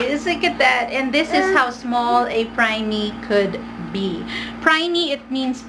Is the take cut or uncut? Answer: uncut